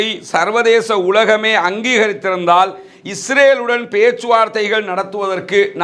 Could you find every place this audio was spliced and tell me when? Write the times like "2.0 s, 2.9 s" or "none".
none